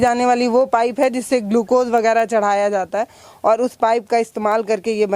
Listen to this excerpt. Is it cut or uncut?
uncut